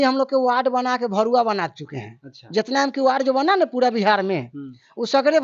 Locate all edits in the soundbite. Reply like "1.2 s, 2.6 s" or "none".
none